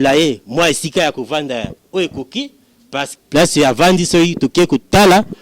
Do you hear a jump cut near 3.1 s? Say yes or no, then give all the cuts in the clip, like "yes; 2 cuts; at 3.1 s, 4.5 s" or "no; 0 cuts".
yes; 1 cut; at 3.1 s